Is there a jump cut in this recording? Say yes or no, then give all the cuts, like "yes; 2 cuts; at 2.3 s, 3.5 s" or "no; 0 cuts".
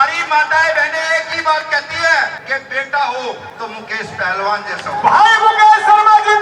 yes; 2 cuts; at 2.4 s, 3.5 s